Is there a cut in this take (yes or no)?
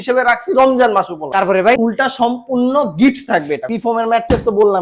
yes